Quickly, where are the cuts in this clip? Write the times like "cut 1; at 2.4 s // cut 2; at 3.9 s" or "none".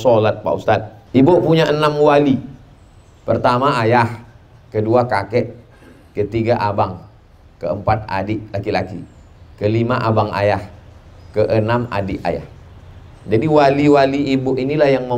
cut 1; at 0.9 s

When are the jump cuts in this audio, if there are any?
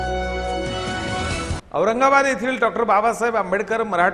cut 1; at 1.5 s

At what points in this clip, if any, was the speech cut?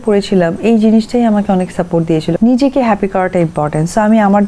cut 1; at 2.4 s

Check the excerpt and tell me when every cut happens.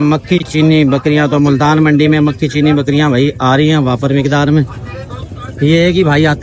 none

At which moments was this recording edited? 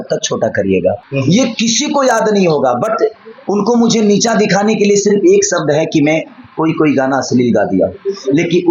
cut 1; at 1.0 s

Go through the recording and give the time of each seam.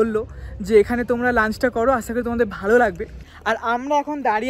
cut 1; at 3.3 s

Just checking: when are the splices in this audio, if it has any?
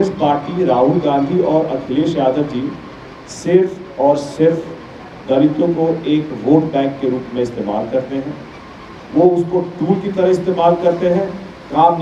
none

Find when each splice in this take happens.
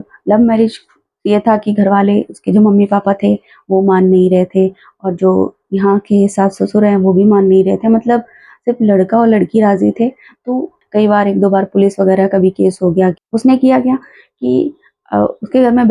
cut 1; at 10.8 s // cut 2; at 13.2 s

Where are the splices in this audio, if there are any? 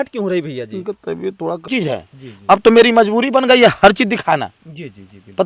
cut 1; at 1.7 s

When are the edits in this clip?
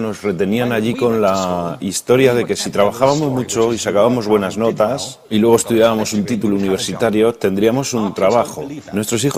none

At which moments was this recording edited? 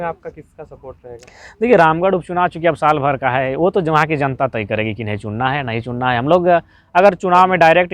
none

